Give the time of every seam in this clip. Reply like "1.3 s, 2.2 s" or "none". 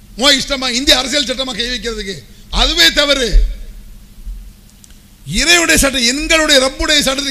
none

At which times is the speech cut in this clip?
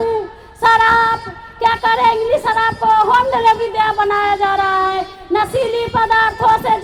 none

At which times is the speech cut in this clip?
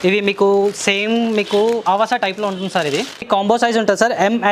3.2 s

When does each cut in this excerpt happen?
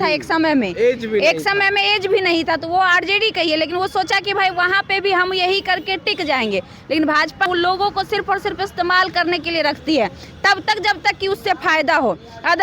7.5 s

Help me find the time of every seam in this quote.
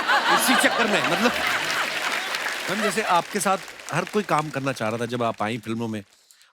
2.7 s

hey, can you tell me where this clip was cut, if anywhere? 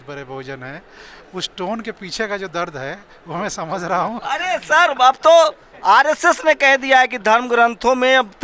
none

